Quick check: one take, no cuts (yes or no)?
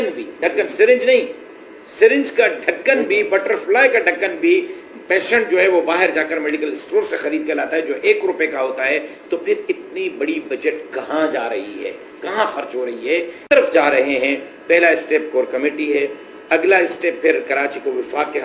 no